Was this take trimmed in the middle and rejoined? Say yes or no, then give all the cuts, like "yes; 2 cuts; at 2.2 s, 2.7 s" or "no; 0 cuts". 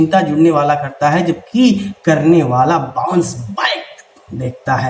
no; 0 cuts